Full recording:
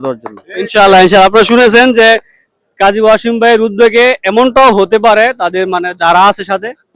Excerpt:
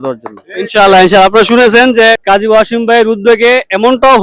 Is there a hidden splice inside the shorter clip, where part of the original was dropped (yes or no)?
yes